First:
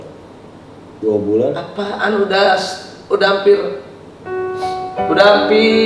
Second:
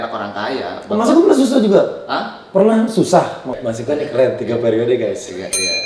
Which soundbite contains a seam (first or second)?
second